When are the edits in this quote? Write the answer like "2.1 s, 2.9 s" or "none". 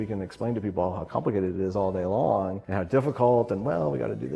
2.6 s